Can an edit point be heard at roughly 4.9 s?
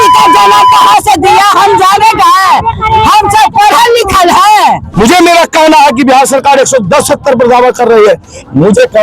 yes; 1 cut; at 4.9 s

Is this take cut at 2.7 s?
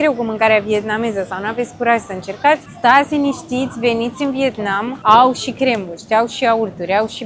yes; 2 cuts; at 2.7 s, 4.9 s

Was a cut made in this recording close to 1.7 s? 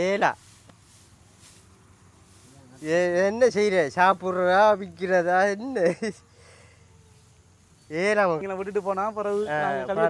no; 1 cut; at 8.4 s

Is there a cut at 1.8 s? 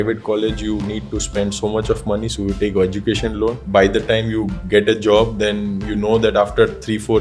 no; 1 cut; at 3.6 s

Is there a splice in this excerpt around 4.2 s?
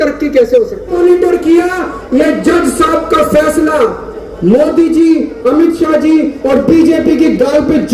no; 1 cut; at 0.9 s

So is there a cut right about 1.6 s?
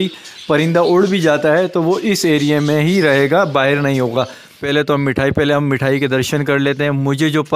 no; 1 cut; at 4.6 s

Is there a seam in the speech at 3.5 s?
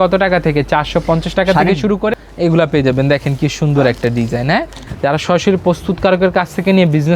no; 2 cuts; at 2.1 s, 4.8 s

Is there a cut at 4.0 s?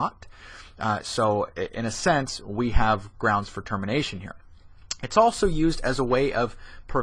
no; 1 cut; at 5.7 s

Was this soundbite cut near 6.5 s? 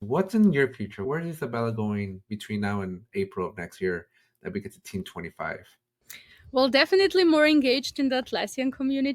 no; 1 cut; at 1.0 s

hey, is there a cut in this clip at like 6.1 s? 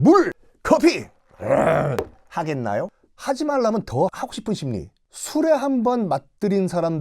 no; 1 cut; at 4.1 s

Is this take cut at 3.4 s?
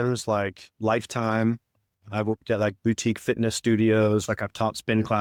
no; 0 cuts

